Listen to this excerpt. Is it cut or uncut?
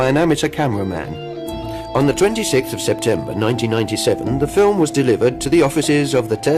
uncut